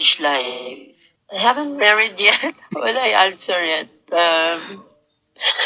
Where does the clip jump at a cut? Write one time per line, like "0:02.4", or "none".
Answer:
none